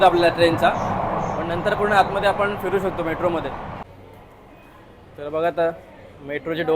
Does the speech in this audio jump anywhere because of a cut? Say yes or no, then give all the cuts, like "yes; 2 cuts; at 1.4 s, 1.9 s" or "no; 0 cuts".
yes; 1 cut; at 3.8 s